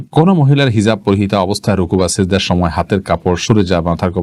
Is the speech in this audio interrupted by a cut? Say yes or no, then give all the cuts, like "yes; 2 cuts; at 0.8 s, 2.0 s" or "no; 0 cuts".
no; 0 cuts